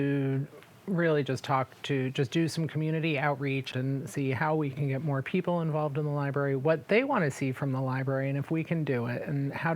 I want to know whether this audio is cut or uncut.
cut